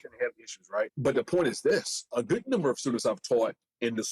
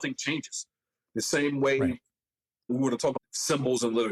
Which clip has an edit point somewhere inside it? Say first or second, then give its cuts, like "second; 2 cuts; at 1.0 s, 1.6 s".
first; 2 cuts; at 0.9 s, 2.1 s